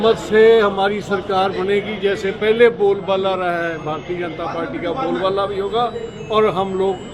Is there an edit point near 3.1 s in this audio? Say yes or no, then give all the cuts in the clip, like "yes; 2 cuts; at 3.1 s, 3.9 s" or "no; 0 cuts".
no; 0 cuts